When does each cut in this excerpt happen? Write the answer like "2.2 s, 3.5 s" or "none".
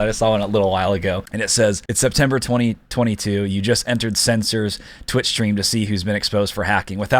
1.4 s